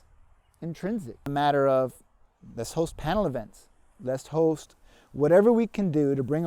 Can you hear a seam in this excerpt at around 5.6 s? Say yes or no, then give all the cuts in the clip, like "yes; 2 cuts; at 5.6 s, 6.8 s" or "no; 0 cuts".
no; 1 cut; at 1.2 s